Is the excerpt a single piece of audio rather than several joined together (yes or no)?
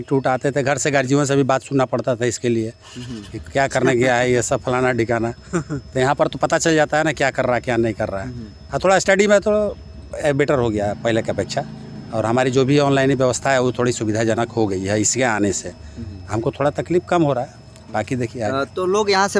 yes